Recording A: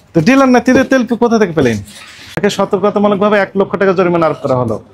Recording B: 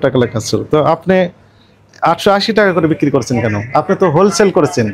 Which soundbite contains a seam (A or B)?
A